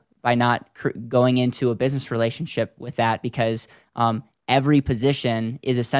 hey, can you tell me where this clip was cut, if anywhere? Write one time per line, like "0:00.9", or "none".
none